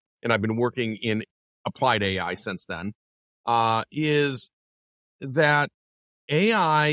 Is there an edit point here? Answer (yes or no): no